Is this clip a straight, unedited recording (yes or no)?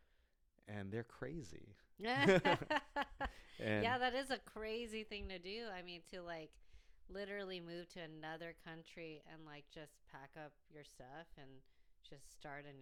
yes